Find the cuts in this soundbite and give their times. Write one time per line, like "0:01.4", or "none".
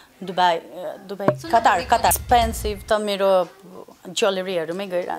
0:02.2